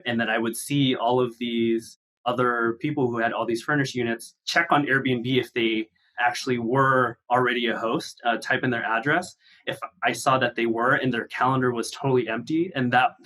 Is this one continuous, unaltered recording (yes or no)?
no